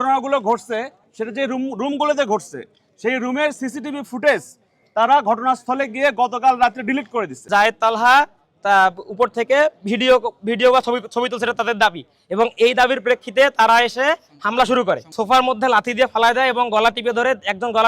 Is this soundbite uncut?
no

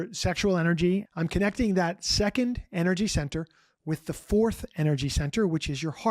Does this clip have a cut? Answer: yes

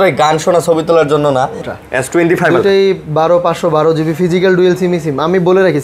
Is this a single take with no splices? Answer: no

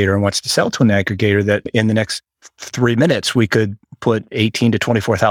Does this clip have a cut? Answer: yes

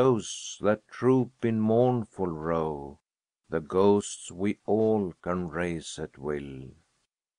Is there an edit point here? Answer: yes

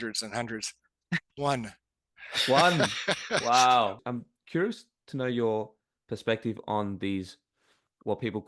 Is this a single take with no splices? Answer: no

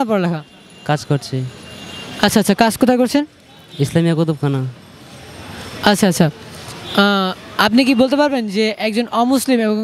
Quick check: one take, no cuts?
yes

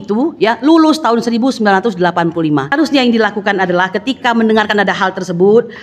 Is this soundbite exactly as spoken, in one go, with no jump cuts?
no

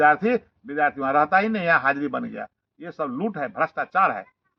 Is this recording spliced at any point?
no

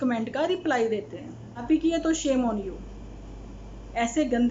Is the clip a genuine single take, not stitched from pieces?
no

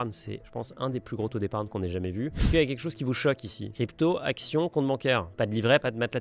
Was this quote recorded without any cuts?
no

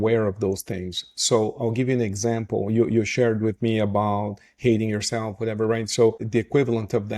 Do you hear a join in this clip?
yes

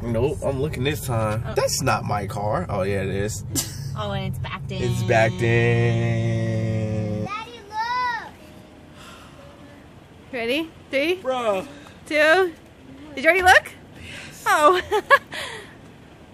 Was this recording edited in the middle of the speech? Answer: yes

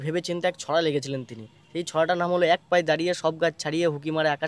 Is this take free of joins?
yes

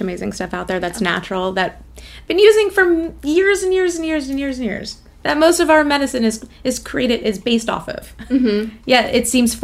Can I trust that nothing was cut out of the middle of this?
yes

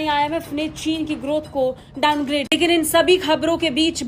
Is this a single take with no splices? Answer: no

